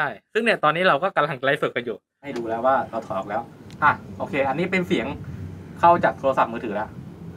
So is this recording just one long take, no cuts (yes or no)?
no